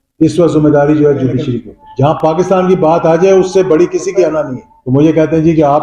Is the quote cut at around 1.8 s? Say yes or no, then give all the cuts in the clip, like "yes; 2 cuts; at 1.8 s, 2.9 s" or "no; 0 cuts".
yes; 2 cuts; at 1.8 s, 4.8 s